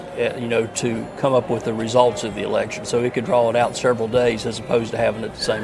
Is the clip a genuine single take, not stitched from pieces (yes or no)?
yes